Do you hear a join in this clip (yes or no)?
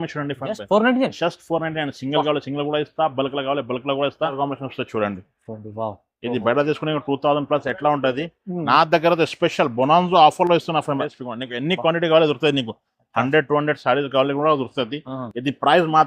yes